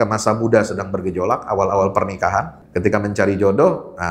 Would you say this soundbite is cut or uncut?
cut